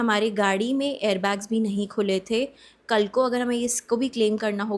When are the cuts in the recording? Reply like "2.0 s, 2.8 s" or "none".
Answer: none